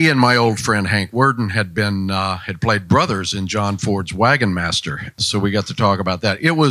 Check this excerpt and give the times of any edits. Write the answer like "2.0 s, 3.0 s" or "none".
none